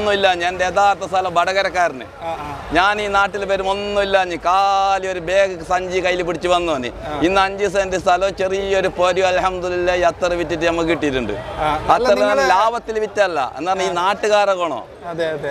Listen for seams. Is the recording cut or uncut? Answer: uncut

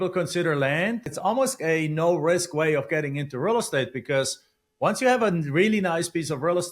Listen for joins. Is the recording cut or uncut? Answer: cut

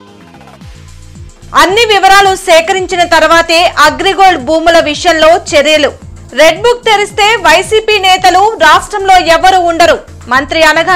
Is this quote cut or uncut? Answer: uncut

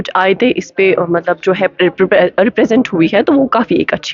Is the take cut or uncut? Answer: uncut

